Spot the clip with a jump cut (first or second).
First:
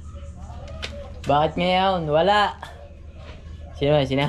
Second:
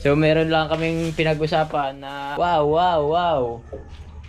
second